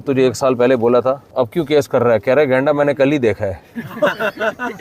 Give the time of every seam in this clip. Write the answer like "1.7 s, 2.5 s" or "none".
1.2 s